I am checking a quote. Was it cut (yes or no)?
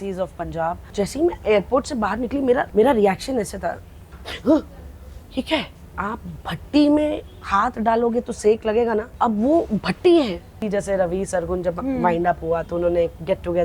yes